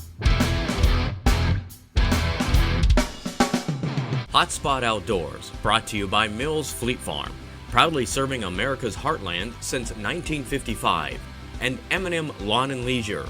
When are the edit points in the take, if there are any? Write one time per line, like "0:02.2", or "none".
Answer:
0:01.3